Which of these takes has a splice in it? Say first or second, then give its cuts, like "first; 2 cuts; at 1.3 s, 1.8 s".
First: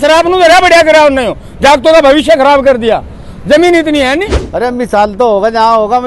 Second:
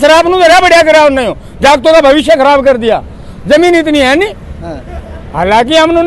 first; 1 cut; at 4.4 s